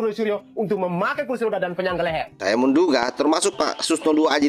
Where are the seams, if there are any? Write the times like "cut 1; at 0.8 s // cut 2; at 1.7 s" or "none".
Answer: cut 1; at 2.3 s